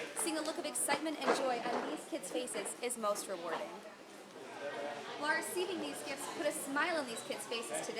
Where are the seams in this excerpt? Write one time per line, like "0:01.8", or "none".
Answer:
0:04.3